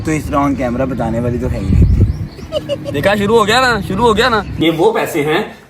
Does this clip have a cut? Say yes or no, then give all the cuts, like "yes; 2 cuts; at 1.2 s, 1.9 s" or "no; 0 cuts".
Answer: yes; 2 cuts; at 2.8 s, 4.5 s